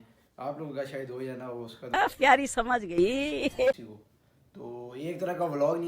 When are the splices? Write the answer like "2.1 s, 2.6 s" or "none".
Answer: 1.8 s, 3.9 s